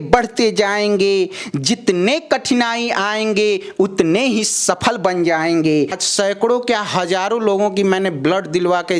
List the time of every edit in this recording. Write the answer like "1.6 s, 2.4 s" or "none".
5.9 s